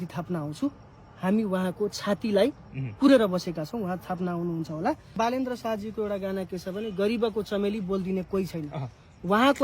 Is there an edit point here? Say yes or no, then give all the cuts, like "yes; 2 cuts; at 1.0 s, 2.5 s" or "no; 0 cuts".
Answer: yes; 1 cut; at 5.1 s